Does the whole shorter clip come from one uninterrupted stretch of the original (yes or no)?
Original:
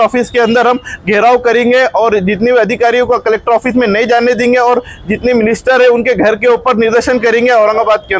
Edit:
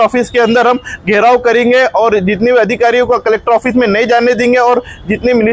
yes